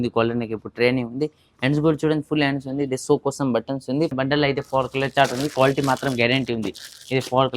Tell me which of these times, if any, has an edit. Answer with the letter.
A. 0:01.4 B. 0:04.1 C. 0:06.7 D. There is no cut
B